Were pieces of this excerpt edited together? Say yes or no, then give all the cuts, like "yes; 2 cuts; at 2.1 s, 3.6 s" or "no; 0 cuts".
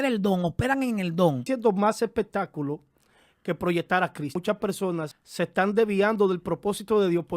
yes; 3 cuts; at 1.5 s, 4.4 s, 5.2 s